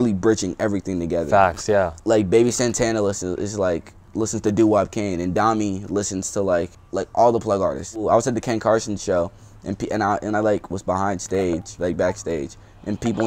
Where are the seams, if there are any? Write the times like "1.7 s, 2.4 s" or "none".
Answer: 2.0 s, 6.8 s, 7.9 s